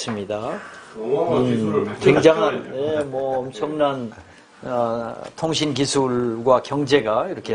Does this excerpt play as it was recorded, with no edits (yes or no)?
yes